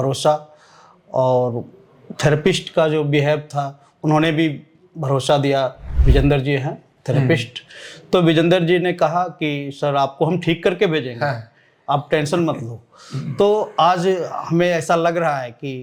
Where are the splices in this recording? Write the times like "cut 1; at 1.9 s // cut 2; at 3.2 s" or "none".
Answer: none